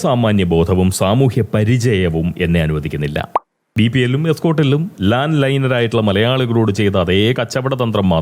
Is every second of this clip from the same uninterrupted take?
no; 1 cut; at 3.3 s

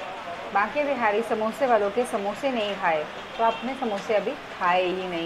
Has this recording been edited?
no; 0 cuts

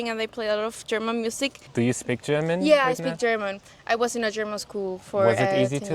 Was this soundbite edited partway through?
yes; 1 cut; at 1.6 s

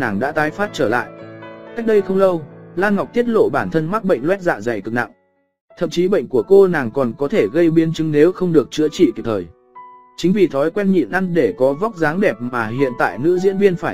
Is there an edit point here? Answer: no; 0 cuts

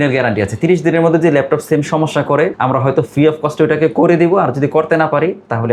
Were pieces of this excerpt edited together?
no; 0 cuts

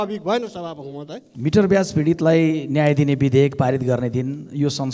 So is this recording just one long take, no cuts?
no; 1 cut; at 1.3 s

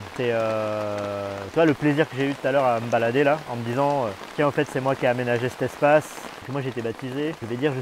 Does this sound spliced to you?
yes; 2 cuts; at 4.2 s, 6.3 s

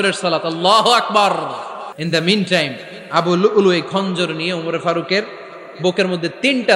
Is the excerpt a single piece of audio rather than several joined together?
no; 1 cut; at 1.9 s

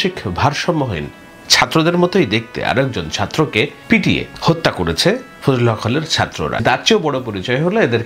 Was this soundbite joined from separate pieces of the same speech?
yes; 2 cuts; at 4.0 s, 6.6 s

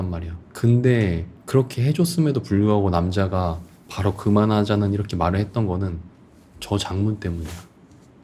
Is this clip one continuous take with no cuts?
yes; 0 cuts

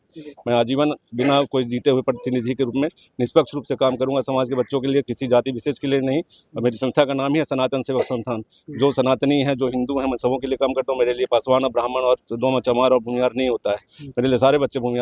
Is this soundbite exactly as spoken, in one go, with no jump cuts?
yes; 0 cuts

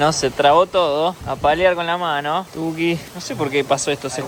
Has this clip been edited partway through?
no; 0 cuts

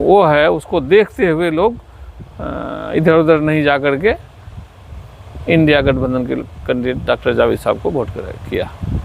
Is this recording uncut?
yes; 0 cuts

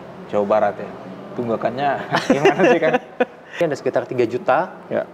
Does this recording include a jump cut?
yes; 1 cut; at 3.4 s

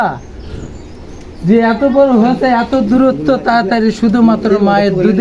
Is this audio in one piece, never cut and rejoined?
yes; 0 cuts

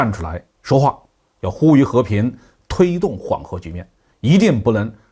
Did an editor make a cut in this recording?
no; 0 cuts

